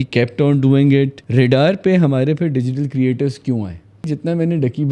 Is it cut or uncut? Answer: cut